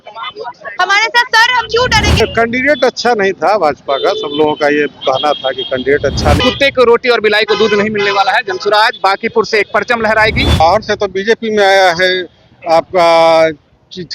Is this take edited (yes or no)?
yes